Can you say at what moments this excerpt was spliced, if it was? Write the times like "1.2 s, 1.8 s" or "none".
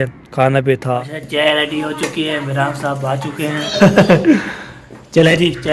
1.1 s, 3.7 s